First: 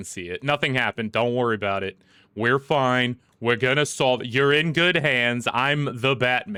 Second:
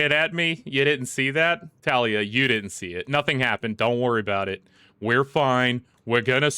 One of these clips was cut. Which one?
second; 1 cut; at 1.7 s

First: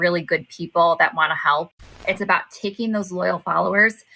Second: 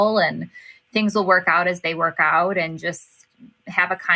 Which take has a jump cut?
first; 1 cut; at 2.0 s

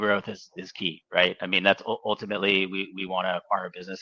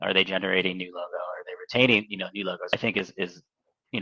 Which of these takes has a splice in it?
second; 1 cut; at 2.7 s

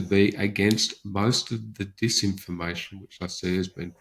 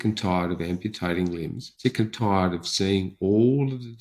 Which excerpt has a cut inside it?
second; 1 cut; at 1.6 s

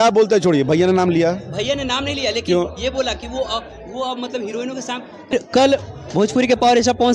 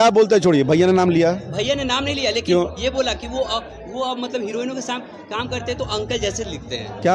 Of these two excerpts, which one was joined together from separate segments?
first; 1 cut; at 5.3 s

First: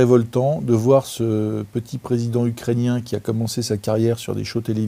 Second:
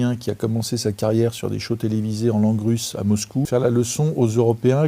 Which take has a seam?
second; 1 cut; at 3.5 s

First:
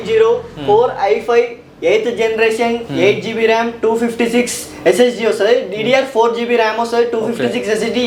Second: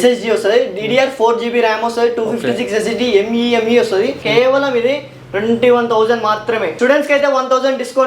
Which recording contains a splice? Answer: second; 2 cuts; at 4.2 s, 6.7 s

